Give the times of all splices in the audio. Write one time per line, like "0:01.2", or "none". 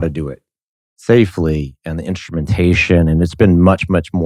none